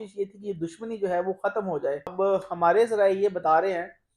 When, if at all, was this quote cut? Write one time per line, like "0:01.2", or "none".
0:02.1